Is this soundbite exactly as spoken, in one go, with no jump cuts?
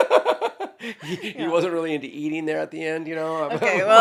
yes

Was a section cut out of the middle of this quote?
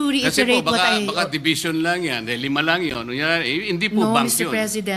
yes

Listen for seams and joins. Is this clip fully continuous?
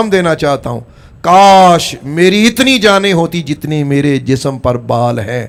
yes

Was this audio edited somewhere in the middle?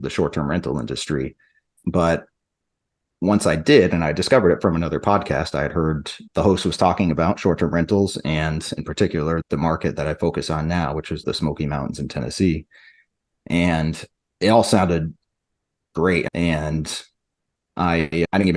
yes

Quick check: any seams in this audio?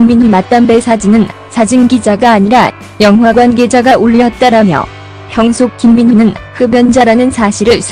yes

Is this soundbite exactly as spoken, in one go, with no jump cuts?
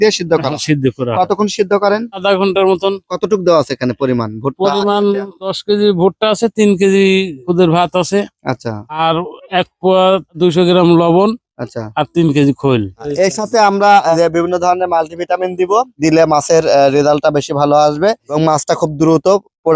no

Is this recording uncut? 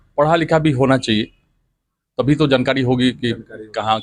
yes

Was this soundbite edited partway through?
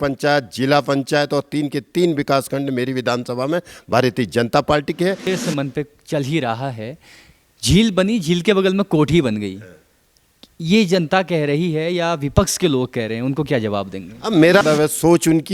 yes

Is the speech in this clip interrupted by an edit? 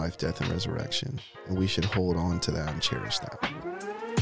yes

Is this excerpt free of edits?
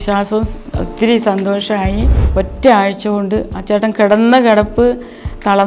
no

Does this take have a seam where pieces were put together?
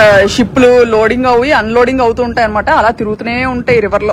no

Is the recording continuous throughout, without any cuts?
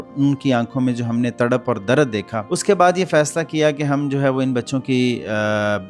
no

